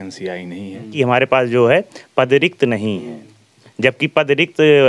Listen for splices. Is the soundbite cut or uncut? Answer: cut